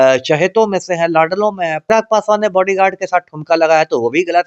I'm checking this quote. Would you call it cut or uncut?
cut